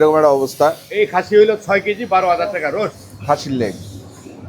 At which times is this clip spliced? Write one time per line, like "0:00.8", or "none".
0:00.8
0:03.1